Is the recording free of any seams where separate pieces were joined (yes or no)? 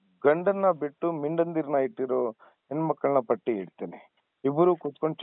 yes